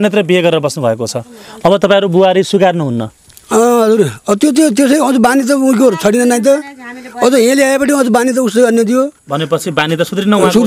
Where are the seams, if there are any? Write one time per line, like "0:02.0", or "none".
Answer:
none

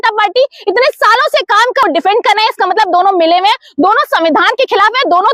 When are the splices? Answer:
0:01.8

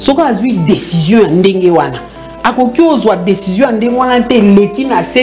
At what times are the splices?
none

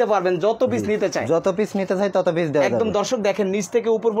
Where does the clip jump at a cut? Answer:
none

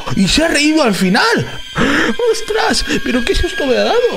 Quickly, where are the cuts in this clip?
0:01.5

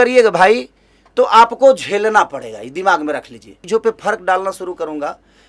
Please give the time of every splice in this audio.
0:03.5

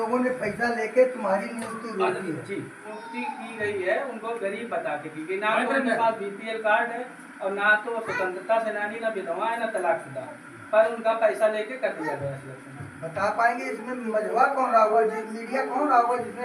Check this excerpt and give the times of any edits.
0:02.9

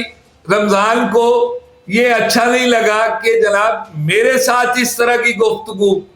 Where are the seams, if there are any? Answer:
none

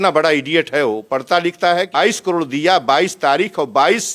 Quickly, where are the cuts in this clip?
0:02.0

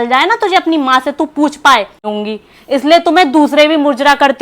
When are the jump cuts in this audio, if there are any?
0:02.0

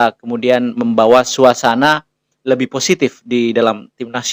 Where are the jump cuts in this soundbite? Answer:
none

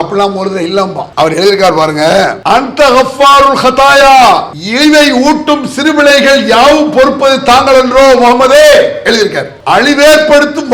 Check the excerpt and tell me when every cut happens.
0:01.0
0:02.4
0:04.6
0:09.5

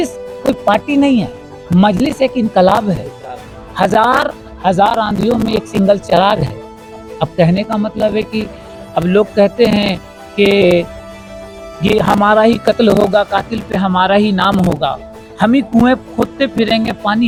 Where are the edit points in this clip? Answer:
none

